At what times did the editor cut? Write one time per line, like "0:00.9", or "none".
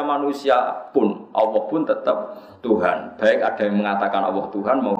0:03.9